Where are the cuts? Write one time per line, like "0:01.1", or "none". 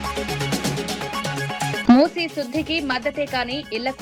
0:01.8